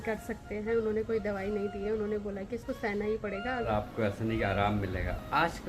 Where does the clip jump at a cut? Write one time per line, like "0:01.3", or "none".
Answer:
0:03.7